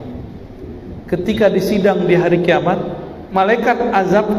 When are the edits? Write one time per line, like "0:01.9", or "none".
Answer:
0:03.2